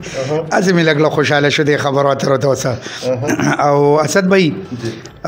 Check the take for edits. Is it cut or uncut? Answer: uncut